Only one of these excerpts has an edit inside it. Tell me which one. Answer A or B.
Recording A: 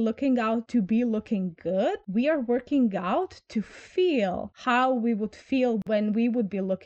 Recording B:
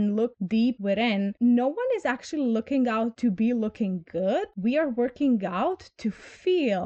A